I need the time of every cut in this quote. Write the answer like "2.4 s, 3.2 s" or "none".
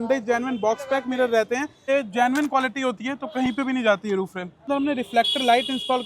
1.9 s, 4.7 s